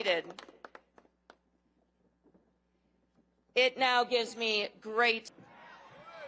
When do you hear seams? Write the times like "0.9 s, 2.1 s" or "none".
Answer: 5.3 s